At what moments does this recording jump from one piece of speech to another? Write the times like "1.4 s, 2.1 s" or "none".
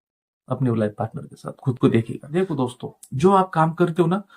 2.3 s